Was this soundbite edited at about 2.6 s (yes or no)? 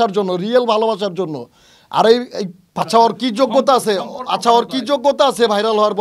yes